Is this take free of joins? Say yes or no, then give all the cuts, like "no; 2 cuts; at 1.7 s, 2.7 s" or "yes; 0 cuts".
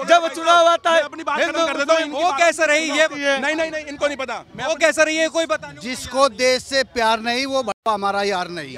yes; 0 cuts